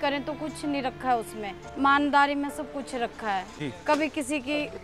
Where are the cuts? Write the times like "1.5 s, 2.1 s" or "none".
1.7 s, 3.5 s